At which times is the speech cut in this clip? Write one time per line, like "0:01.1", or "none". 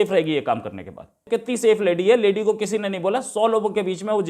0:01.2